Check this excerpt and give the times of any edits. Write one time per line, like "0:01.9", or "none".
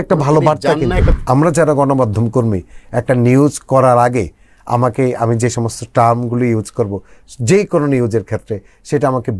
0:01.1